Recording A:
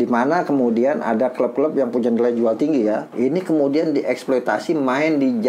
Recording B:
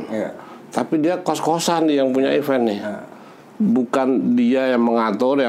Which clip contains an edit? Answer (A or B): A